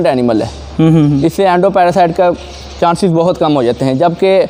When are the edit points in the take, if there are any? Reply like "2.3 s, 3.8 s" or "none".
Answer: none